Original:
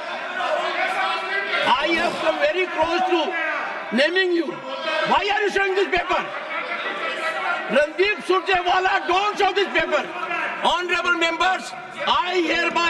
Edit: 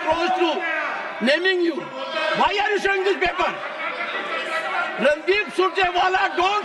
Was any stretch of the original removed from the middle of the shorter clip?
no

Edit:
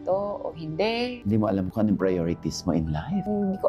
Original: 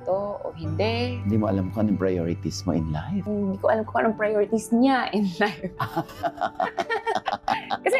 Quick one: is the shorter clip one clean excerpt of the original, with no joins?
yes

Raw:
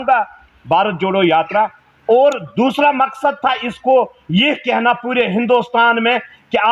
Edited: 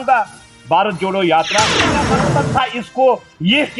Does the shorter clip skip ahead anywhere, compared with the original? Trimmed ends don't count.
yes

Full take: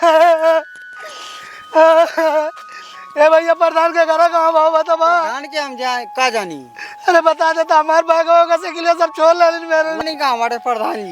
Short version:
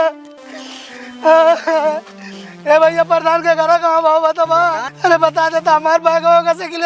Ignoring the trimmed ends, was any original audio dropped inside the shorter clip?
yes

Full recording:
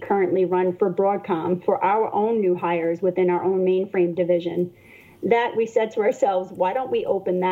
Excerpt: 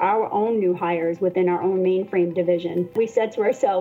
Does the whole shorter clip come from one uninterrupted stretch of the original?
no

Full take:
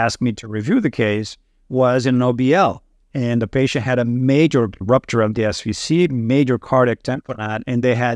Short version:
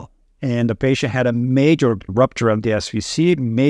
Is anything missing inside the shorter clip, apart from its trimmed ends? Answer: no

